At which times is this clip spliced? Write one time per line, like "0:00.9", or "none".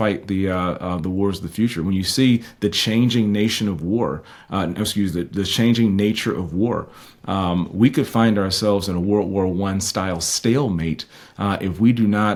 none